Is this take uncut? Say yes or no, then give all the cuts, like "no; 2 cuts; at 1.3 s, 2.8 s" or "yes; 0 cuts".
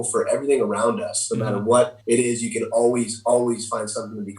no; 1 cut; at 2.0 s